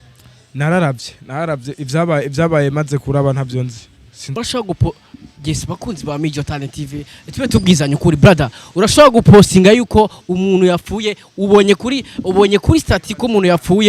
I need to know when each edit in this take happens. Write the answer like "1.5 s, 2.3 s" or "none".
4.4 s